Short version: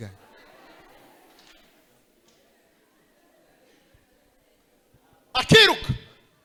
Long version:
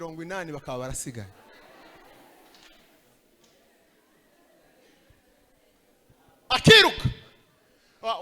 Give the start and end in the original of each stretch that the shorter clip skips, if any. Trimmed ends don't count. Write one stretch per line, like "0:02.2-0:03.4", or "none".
none